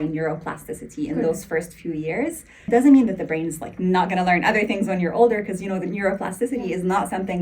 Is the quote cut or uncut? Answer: uncut